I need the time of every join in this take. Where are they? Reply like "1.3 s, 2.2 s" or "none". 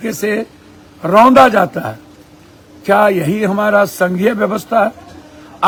none